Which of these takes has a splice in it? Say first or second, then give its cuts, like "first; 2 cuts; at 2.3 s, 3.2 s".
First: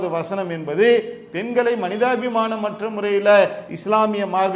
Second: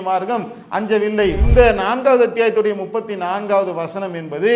second; 1 cut; at 1.4 s